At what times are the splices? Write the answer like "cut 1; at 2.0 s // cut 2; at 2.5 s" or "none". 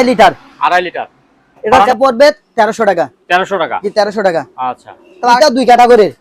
cut 1; at 1.9 s // cut 2; at 5.4 s